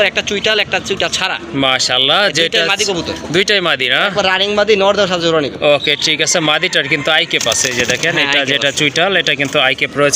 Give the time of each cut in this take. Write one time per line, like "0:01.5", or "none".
none

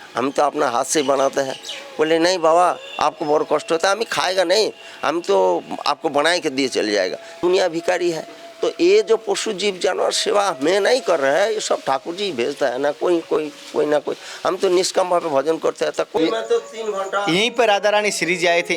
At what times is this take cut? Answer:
0:07.2
0:16.2

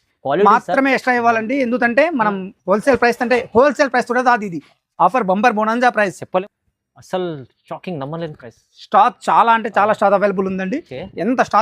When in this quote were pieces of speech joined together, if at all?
0:06.4

